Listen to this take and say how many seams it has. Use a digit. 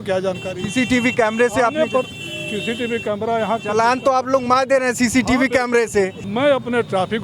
1